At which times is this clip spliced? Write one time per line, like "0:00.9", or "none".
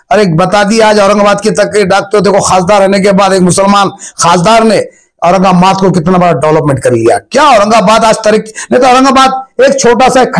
none